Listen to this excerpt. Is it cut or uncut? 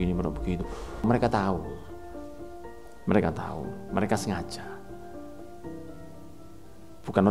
cut